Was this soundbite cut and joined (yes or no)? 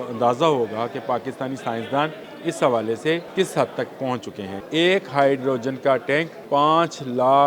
yes